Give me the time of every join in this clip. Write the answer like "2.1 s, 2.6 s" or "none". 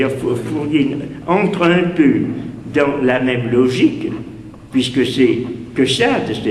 5.1 s